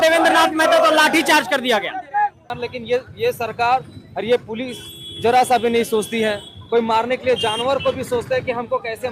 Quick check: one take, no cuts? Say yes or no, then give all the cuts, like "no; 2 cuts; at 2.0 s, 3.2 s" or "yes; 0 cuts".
no; 1 cut; at 2.5 s